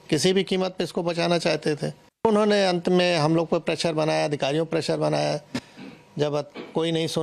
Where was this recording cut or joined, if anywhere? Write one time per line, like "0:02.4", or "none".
0:02.2